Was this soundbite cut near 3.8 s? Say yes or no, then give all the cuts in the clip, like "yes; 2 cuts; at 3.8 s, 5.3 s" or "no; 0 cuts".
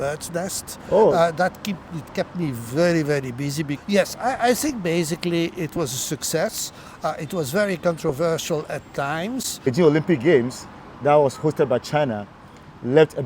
yes; 2 cuts; at 3.8 s, 9.7 s